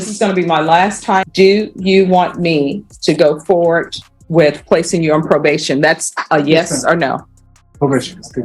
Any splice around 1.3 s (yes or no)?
yes